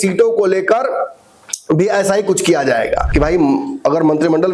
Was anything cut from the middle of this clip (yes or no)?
yes